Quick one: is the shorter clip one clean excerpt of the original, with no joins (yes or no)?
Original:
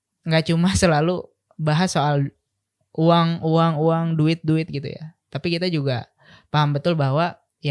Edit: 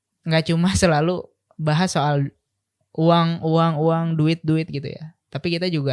yes